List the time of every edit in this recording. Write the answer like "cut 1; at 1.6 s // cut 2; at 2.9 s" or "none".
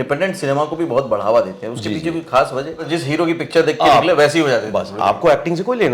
cut 1; at 2.9 s